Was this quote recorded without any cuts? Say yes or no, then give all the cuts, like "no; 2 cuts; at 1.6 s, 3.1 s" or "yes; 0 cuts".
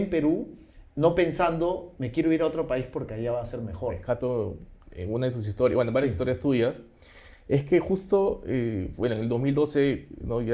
no; 1 cut; at 4.0 s